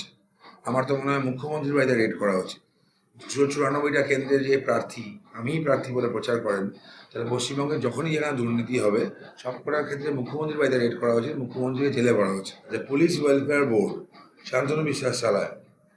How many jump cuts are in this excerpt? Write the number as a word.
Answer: one